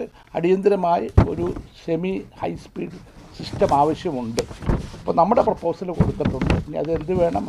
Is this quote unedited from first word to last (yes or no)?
yes